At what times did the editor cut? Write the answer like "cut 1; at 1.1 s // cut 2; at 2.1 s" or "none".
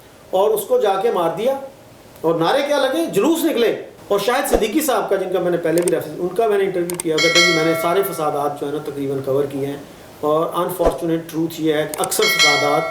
cut 1; at 3.9 s